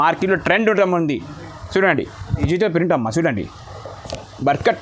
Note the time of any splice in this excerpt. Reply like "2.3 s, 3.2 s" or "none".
2.4 s